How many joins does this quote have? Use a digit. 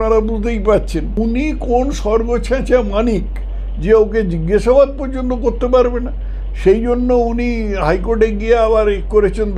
1